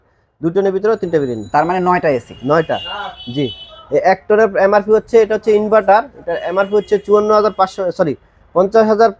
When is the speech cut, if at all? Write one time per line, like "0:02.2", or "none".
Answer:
none